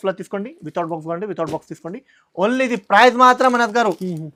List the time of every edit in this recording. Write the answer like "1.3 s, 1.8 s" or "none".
none

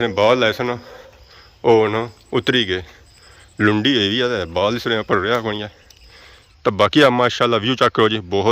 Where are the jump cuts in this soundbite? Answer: 6.3 s

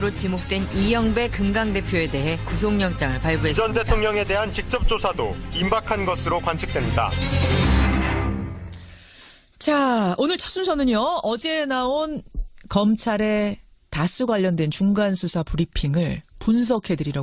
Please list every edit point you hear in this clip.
none

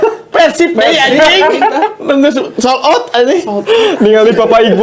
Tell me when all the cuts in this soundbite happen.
none

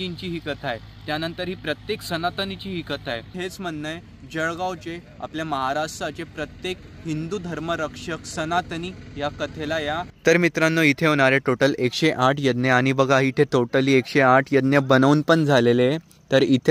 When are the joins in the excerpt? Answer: none

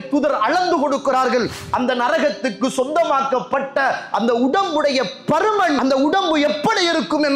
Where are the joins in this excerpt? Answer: 1.6 s, 5.8 s

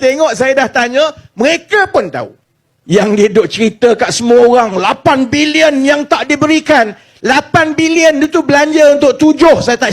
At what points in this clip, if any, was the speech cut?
2.7 s

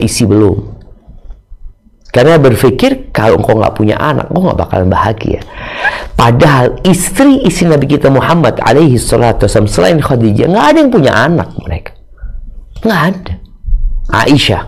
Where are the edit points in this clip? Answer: none

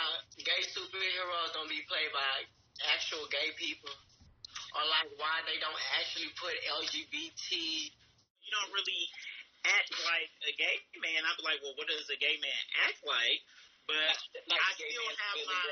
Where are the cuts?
8.5 s

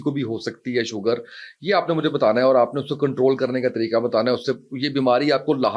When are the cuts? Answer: none

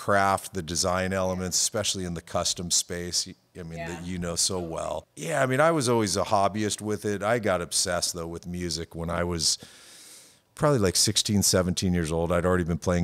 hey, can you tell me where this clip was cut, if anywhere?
5.1 s

